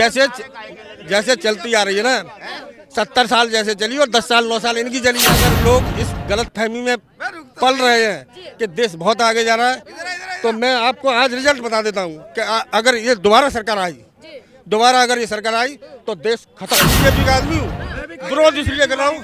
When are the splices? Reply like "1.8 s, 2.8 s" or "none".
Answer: 5.3 s, 16.9 s